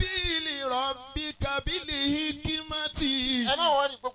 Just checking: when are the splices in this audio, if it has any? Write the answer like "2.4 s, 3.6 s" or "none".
none